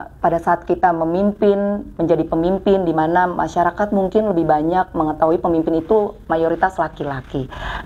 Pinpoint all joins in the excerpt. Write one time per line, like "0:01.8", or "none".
none